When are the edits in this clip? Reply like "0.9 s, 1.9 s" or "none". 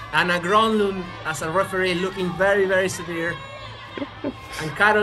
none